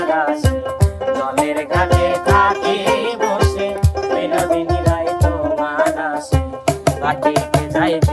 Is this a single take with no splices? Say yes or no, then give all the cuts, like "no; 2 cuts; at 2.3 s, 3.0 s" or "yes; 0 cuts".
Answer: yes; 0 cuts